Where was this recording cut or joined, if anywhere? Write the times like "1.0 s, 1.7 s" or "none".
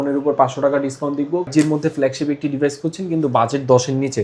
1.5 s